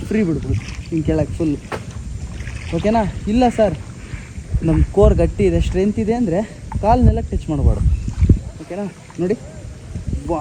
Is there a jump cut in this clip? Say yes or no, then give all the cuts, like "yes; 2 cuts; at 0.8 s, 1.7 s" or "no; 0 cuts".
no; 0 cuts